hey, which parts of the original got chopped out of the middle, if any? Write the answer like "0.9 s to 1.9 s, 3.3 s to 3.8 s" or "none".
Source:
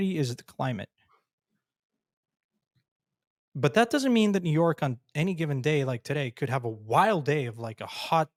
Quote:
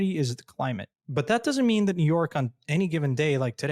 0.9 s to 3.4 s